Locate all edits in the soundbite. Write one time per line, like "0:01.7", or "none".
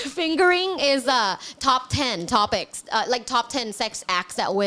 none

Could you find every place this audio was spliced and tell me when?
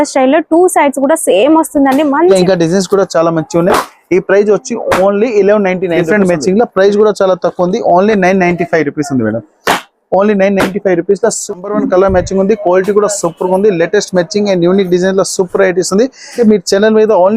0:02.3
0:06.0
0:11.6
0:16.3

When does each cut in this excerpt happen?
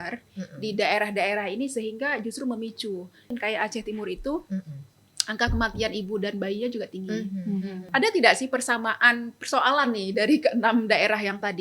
0:03.3
0:07.8

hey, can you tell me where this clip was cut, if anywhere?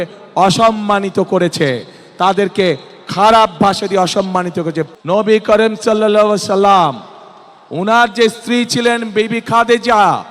0:04.9

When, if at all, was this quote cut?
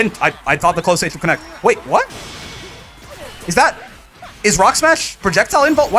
none

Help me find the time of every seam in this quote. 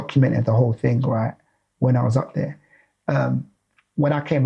none

